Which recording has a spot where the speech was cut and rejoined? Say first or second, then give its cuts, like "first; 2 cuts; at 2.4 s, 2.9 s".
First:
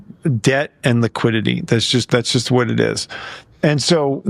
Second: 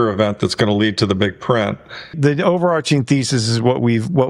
second; 1 cut; at 2.1 s